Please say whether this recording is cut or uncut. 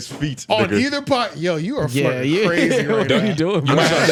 uncut